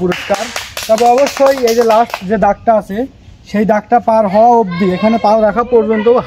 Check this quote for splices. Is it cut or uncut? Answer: uncut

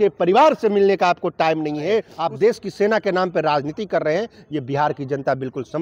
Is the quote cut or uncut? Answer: cut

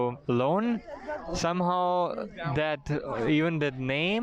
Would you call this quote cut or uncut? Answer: uncut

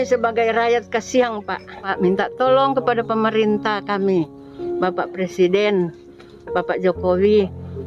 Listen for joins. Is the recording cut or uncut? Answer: cut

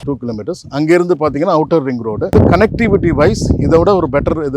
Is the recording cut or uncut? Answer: cut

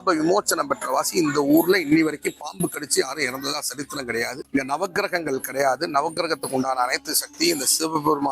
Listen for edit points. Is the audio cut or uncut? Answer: cut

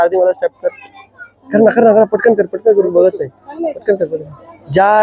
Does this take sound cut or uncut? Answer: uncut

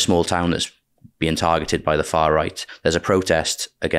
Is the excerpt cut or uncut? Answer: cut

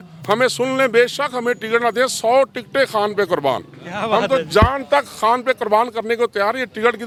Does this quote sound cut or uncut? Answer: uncut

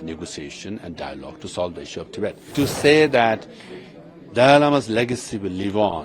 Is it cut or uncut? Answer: cut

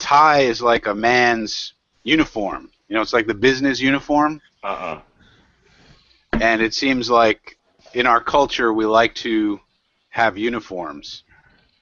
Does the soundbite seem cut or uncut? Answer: uncut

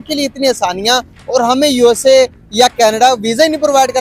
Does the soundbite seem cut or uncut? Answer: uncut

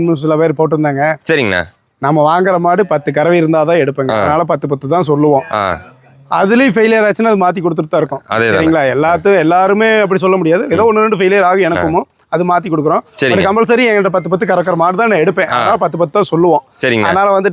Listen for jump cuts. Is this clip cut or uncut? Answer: uncut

